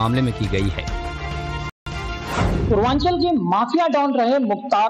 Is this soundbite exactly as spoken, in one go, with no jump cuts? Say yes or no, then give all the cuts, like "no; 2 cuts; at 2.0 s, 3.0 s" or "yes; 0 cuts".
yes; 0 cuts